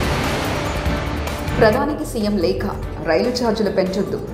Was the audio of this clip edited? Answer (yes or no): yes